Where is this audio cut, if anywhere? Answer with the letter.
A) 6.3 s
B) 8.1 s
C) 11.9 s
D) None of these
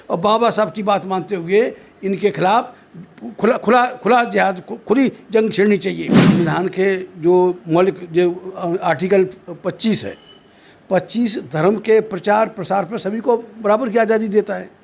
A